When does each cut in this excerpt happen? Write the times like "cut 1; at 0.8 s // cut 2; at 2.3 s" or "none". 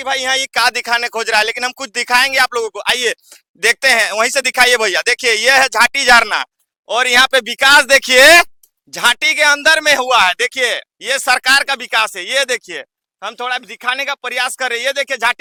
none